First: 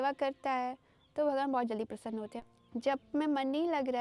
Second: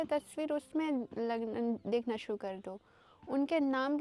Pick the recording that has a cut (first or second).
first